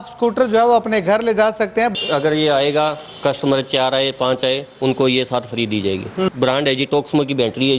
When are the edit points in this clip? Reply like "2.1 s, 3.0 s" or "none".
1.9 s, 6.3 s